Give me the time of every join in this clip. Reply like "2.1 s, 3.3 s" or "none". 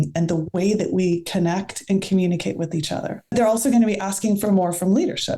3.3 s